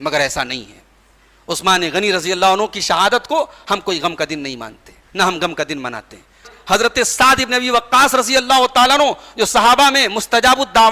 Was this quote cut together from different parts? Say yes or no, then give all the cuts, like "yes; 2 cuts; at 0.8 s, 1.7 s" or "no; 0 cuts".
yes; 1 cut; at 6.5 s